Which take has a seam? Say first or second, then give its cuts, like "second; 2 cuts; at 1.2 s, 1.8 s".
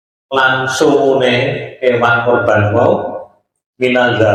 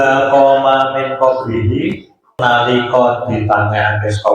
second; 1 cut; at 2.4 s